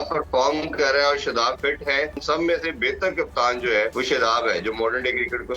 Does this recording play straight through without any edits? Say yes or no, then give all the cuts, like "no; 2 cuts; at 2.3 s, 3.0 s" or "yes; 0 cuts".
no; 2 cuts; at 2.2 s, 3.9 s